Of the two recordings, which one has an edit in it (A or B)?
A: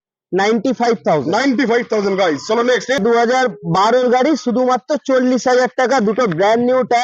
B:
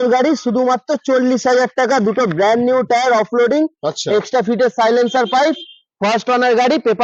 A